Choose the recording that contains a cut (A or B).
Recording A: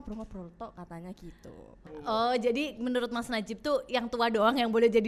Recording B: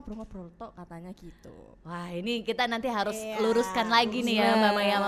A